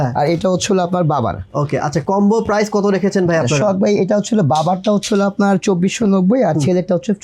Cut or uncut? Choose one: uncut